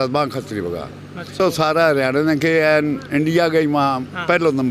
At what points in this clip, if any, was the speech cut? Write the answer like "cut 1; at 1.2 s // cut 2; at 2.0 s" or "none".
cut 1; at 1.4 s

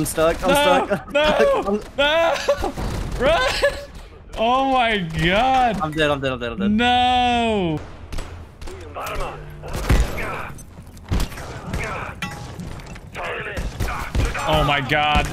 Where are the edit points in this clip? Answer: cut 1; at 7.8 s

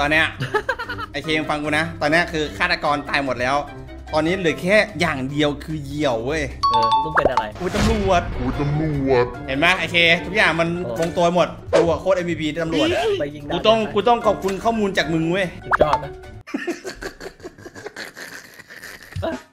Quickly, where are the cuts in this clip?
cut 1; at 7.5 s // cut 2; at 9.4 s

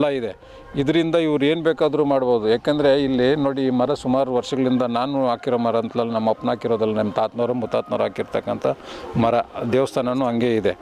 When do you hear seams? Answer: none

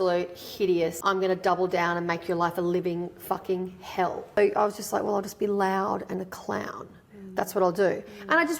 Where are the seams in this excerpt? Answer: cut 1; at 1.0 s // cut 2; at 4.4 s

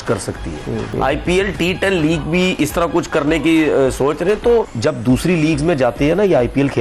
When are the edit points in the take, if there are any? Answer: cut 1; at 0.9 s // cut 2; at 4.7 s

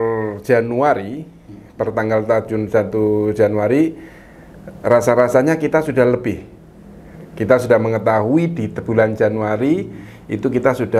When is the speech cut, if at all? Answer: none

